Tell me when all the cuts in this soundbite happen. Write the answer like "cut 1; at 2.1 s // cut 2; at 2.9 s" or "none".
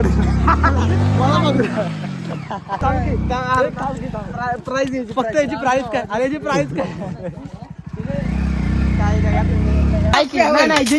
cut 1; at 2.8 s // cut 2; at 10.1 s